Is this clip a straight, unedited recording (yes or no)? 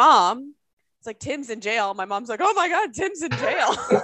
yes